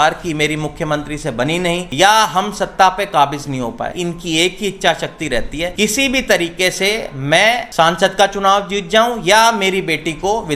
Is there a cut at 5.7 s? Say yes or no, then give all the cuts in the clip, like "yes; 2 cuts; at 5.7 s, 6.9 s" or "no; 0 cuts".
yes; 4 cuts; at 1.9 s, 3.9 s, 5.7 s, 7.7 s